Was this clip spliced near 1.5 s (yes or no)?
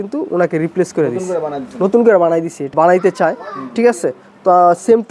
no